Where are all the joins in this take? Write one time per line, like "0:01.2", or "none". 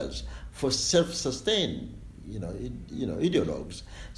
none